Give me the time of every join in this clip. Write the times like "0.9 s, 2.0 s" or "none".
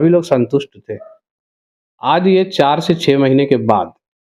none